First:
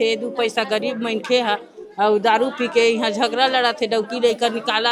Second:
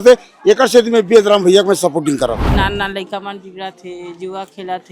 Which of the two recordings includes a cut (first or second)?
second